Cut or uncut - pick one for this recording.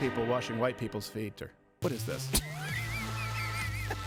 uncut